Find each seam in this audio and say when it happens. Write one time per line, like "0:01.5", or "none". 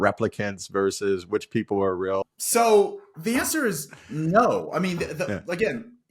0:02.3